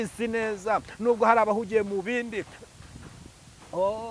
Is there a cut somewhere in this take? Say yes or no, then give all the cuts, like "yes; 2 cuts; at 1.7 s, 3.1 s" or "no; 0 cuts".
no; 0 cuts